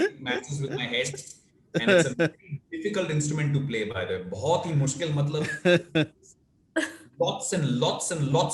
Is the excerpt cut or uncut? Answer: uncut